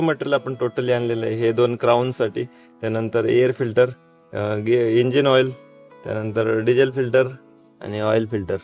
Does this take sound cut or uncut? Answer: uncut